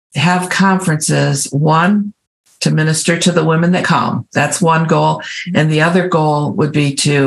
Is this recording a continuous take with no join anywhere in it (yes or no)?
no